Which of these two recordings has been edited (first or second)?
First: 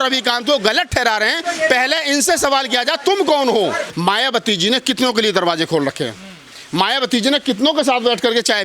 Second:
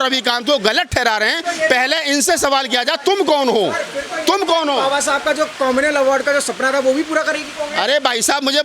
first